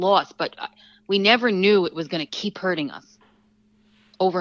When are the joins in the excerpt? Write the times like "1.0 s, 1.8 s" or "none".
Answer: none